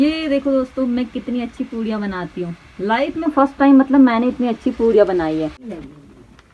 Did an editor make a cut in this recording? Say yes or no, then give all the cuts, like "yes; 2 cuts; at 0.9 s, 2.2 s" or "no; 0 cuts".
no; 0 cuts